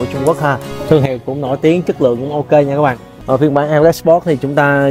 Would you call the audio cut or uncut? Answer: cut